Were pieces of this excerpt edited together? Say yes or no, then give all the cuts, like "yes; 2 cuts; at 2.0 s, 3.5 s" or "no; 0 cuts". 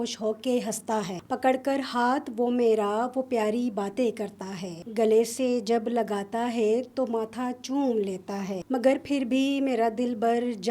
yes; 3 cuts; at 1.2 s, 4.8 s, 8.6 s